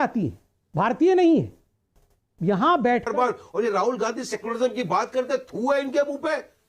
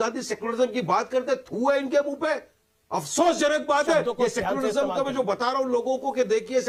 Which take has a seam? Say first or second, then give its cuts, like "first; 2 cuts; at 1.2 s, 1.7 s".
first; 1 cut; at 3.1 s